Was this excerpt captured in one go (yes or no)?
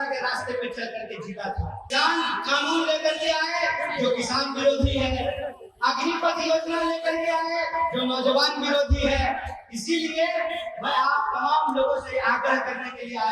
no